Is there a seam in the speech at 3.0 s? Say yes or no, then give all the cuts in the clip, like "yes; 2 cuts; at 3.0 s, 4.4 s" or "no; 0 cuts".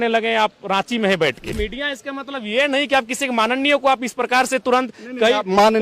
no; 1 cut; at 1.6 s